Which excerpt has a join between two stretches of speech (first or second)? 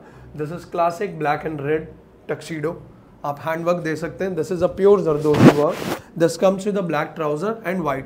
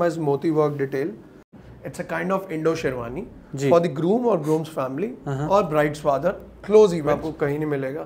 second